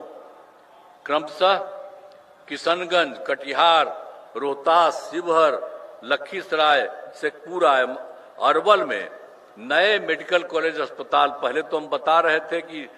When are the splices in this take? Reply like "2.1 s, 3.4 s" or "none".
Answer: none